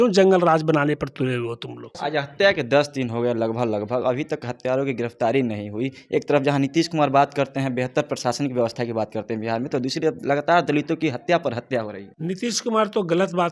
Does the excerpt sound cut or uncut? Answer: cut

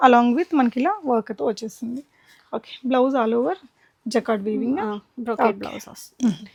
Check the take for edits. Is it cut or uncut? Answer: uncut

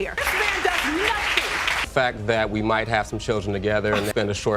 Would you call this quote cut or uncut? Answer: uncut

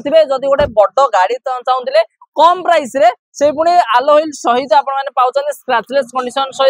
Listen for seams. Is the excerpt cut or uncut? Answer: uncut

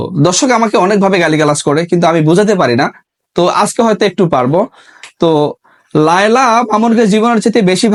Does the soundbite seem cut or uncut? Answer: uncut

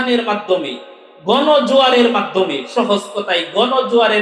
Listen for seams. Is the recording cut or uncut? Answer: uncut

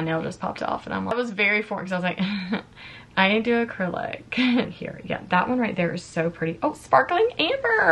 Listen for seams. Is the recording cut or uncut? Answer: cut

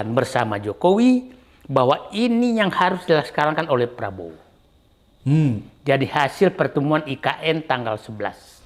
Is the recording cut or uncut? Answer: uncut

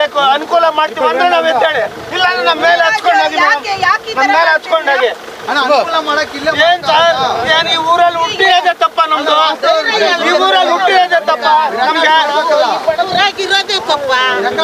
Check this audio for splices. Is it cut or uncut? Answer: uncut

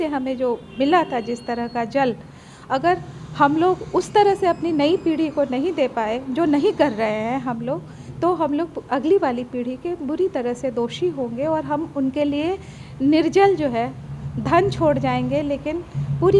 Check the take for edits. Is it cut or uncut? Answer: uncut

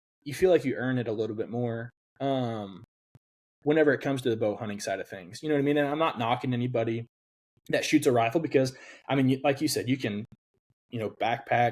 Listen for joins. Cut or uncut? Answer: uncut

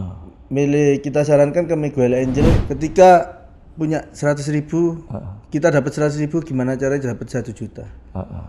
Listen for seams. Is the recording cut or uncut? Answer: cut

